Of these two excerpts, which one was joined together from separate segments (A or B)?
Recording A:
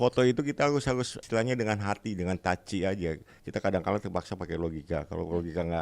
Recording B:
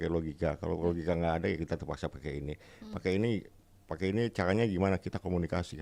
A